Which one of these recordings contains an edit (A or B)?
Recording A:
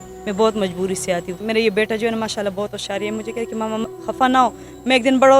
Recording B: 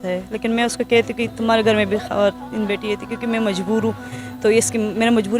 A